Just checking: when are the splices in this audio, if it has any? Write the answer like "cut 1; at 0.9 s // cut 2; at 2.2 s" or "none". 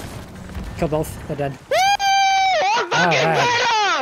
cut 1; at 1.6 s